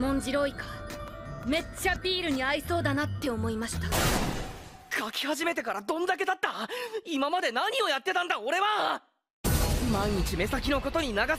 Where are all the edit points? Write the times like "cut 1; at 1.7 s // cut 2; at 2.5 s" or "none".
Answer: cut 1; at 8.8 s